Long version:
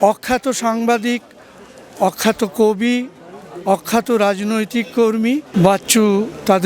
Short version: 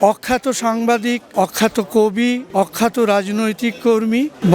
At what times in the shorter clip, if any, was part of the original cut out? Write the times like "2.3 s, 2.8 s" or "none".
1.2 s, 2.4 s